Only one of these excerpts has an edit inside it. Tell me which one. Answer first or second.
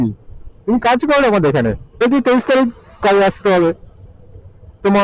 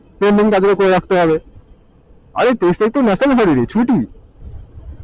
first